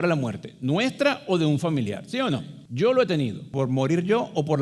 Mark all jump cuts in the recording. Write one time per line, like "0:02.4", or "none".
0:02.6
0:03.5